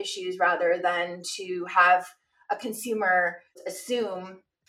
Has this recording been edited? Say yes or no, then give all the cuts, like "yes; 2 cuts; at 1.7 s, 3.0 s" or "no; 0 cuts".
yes; 1 cut; at 3.6 s